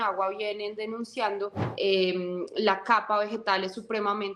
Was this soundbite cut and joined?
yes; 1 cut; at 1.6 s

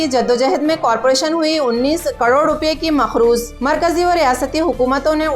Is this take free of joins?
yes; 0 cuts

